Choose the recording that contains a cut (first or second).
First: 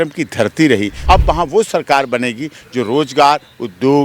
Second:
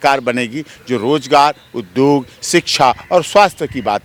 first